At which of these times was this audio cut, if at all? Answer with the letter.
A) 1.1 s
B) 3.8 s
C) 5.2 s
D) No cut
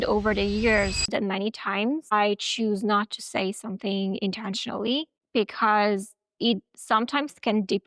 A